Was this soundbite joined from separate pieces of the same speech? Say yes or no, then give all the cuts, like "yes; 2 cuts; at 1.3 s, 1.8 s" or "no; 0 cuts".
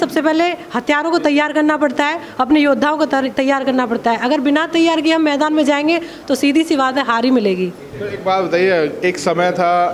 no; 0 cuts